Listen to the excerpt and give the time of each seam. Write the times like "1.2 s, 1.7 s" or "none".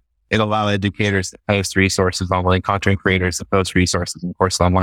none